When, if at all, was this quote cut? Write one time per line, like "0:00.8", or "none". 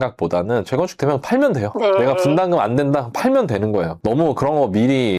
0:04.0